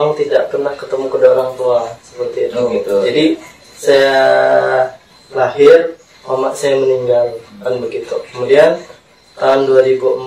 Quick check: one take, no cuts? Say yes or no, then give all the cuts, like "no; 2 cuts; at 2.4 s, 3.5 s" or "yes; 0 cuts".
yes; 0 cuts